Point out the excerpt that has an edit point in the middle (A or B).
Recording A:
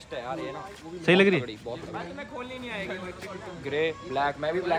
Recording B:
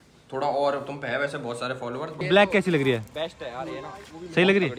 B